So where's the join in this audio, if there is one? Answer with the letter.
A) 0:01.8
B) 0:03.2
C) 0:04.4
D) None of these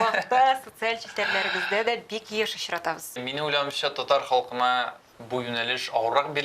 B